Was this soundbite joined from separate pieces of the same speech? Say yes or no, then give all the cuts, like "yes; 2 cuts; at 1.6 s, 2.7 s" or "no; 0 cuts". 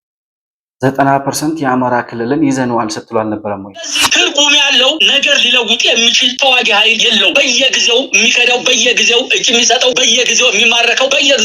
yes; 1 cut; at 4.0 s